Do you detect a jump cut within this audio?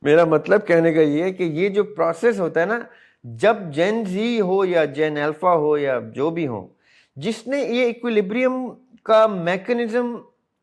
no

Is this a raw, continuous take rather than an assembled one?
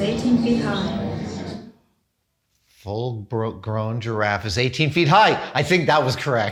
yes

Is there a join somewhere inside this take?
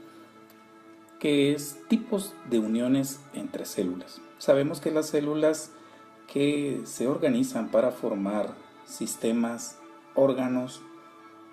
no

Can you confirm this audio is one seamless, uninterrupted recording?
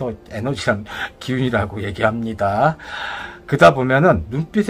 yes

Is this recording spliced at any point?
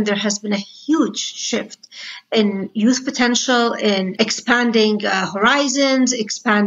no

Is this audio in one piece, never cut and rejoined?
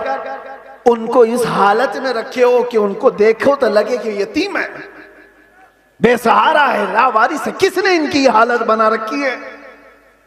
yes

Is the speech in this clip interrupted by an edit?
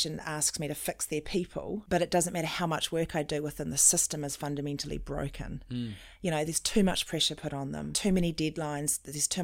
yes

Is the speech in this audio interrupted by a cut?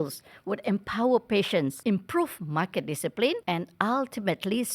yes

